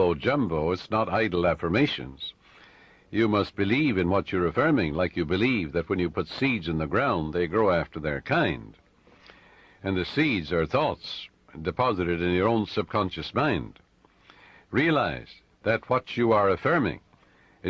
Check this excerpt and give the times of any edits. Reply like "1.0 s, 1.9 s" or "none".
10.7 s